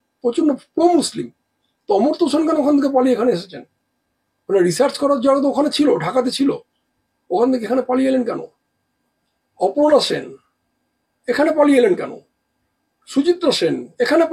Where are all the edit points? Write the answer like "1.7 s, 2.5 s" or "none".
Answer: none